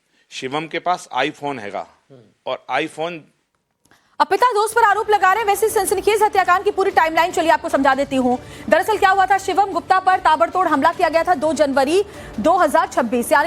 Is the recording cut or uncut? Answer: cut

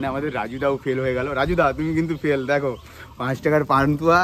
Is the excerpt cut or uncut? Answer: uncut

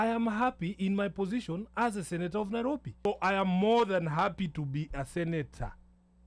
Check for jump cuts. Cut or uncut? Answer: cut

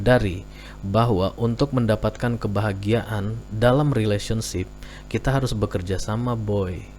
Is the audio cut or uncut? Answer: uncut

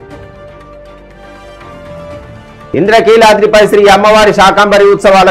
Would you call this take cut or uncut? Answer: cut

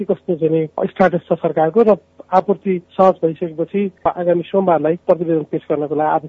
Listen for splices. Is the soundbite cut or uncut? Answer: cut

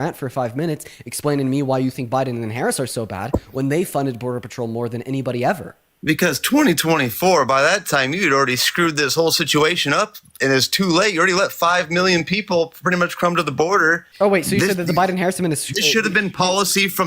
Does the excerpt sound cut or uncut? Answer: cut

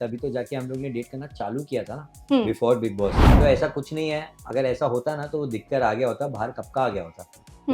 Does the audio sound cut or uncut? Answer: cut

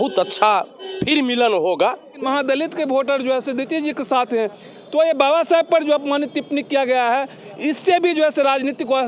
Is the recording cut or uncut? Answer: cut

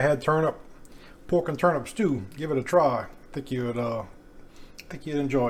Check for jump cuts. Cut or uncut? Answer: uncut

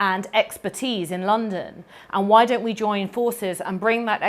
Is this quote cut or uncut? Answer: uncut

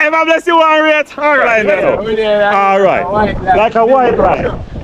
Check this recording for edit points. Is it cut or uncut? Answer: cut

